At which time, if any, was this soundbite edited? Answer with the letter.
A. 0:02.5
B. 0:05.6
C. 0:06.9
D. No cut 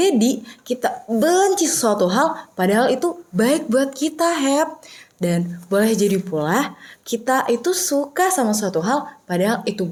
D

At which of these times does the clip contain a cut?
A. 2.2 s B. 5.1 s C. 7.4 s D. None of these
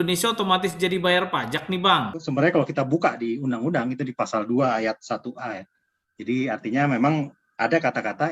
A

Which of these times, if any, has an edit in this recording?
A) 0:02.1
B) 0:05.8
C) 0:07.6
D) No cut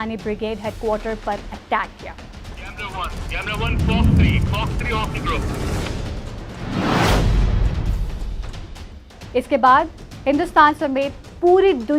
A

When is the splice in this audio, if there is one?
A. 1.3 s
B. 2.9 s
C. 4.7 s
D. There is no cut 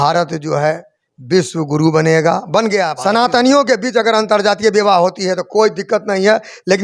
B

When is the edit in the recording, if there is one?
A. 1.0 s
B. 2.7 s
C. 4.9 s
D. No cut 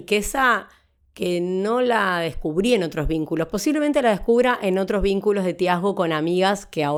D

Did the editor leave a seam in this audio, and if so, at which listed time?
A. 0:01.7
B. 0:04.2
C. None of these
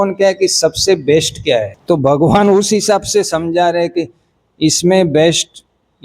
A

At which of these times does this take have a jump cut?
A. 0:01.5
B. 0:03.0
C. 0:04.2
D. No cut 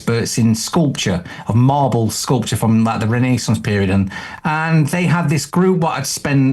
C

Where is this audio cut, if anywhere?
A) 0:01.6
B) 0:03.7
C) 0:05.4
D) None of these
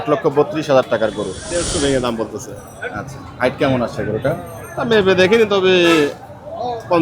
A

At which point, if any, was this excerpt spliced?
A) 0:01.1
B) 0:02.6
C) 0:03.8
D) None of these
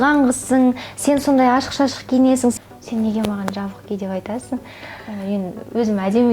B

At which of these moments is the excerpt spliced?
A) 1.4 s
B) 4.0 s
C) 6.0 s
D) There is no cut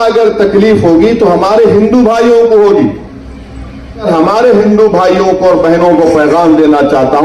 B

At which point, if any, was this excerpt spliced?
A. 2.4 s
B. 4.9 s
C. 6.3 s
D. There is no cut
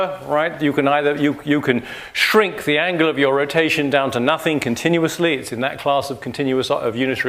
D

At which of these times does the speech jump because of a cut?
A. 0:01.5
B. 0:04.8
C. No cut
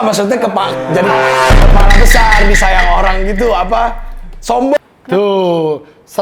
B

